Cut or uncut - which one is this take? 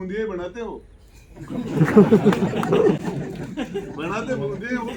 uncut